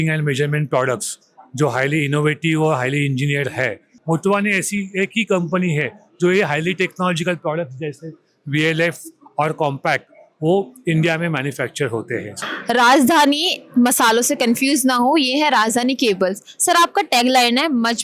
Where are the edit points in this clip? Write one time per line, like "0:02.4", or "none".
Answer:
0:03.9
0:12.3